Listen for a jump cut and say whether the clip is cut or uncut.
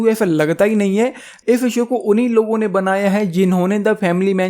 cut